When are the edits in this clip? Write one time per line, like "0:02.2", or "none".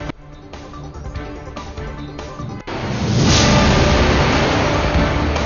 0:02.6